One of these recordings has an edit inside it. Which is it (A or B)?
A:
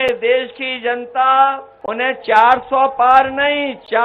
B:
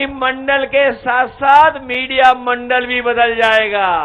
A